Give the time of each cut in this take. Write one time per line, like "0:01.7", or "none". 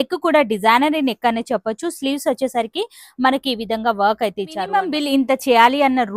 0:04.7